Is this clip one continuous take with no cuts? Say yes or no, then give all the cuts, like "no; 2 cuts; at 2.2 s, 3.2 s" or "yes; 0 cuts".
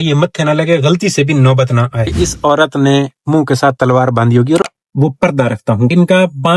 no; 2 cuts; at 2.1 s, 4.6 s